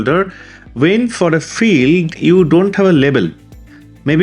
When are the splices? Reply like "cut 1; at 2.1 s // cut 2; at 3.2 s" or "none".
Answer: none